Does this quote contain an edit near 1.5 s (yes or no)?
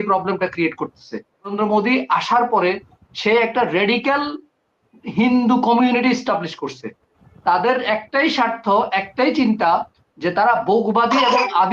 yes